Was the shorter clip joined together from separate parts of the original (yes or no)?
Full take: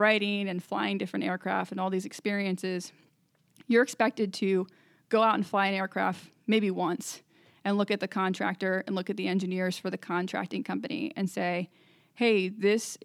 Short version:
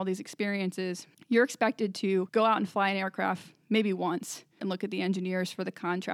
yes